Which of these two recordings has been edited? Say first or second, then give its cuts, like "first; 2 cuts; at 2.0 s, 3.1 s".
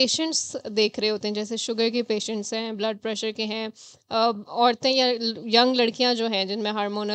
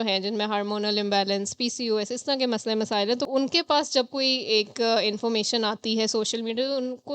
second; 1 cut; at 3.3 s